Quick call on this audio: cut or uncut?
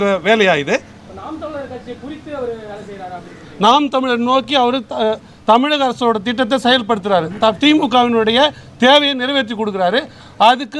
uncut